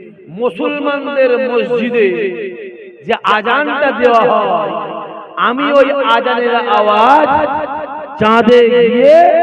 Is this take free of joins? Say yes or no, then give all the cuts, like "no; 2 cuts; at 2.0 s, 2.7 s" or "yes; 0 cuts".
yes; 0 cuts